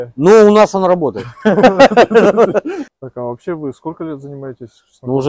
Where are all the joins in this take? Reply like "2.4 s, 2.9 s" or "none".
2.5 s